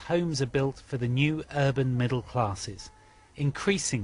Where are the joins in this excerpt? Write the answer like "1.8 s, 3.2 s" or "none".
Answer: none

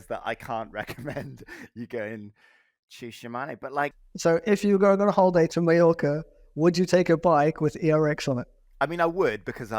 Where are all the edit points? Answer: 4.1 s, 5.5 s, 8.6 s

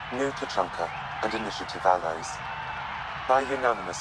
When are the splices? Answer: none

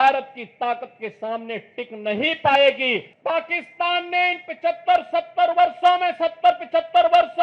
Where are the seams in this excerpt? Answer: 3.1 s

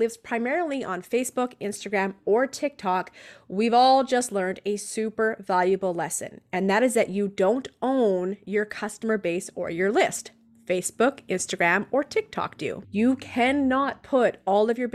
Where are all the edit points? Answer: 12.8 s

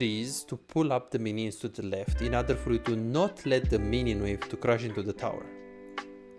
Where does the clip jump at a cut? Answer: none

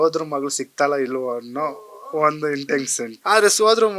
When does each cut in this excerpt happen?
3.1 s

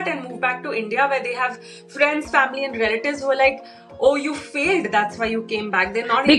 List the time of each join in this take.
none

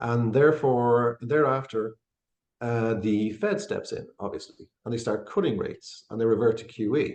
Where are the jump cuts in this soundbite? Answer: none

